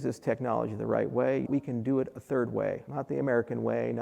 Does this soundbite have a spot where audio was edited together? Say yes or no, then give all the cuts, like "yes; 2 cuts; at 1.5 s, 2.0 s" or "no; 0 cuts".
yes; 2 cuts; at 1.4 s, 2.9 s